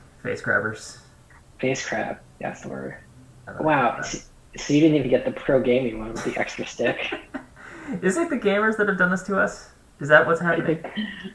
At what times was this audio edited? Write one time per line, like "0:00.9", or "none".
0:03.5

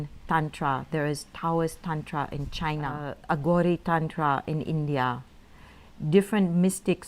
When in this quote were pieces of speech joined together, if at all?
0:03.1

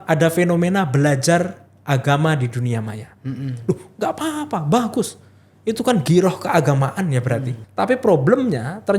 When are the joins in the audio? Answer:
0:07.5

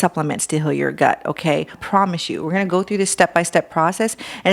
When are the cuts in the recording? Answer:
0:01.8

